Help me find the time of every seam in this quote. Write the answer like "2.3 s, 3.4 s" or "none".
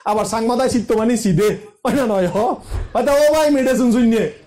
2.8 s